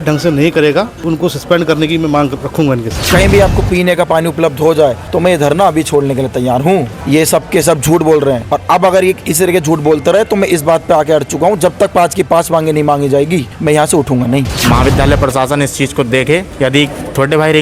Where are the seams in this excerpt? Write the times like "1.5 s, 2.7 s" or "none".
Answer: 1.1 s, 2.9 s, 5.0 s, 6.9 s, 8.5 s, 13.5 s, 14.5 s, 16.7 s